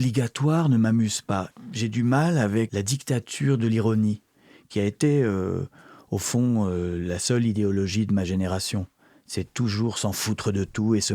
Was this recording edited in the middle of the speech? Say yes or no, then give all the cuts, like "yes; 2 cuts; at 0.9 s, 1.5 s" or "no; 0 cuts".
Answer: yes; 2 cuts; at 1.5 s, 2.7 s